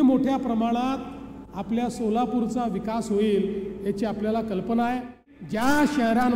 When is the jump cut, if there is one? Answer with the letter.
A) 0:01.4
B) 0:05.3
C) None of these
B